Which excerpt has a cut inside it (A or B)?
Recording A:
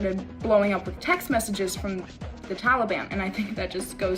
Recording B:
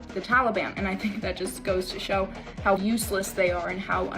B